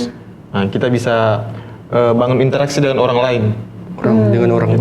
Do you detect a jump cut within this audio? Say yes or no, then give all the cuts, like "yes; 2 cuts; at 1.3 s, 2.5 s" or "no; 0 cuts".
no; 0 cuts